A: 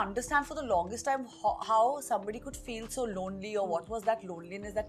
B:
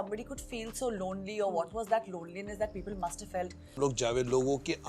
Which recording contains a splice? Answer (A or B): B